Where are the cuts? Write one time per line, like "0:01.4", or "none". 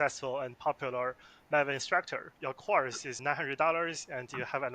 0:02.2
0:03.2